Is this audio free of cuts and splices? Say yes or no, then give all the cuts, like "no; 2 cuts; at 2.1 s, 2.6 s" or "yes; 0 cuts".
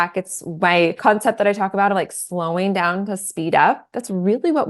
no; 1 cut; at 1.0 s